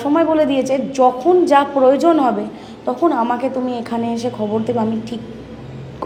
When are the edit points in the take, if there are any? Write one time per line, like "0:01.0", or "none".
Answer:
none